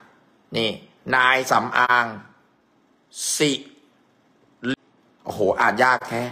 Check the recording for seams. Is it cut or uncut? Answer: cut